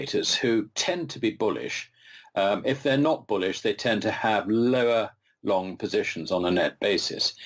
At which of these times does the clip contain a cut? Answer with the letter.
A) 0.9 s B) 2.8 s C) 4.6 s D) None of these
C